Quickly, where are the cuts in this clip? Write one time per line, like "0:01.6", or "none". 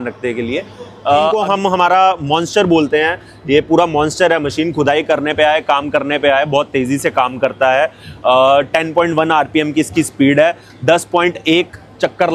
0:01.4